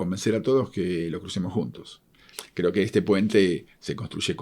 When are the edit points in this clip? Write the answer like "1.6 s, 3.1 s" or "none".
2.4 s